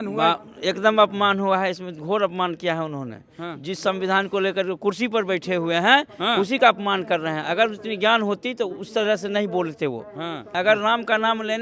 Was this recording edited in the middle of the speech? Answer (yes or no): yes